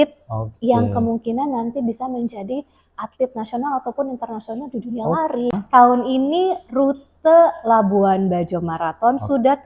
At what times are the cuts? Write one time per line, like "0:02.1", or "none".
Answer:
0:05.5